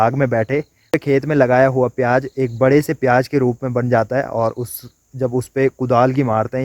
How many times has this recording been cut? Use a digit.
1